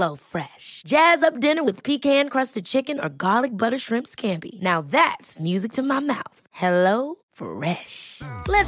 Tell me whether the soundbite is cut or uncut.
uncut